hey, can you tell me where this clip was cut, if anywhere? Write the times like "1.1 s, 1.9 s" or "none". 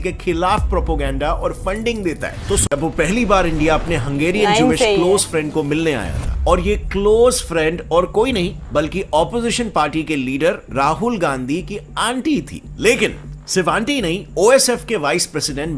2.6 s